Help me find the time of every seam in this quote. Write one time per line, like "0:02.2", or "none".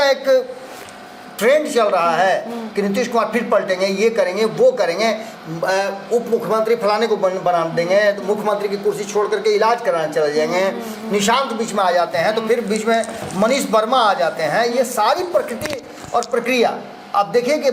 none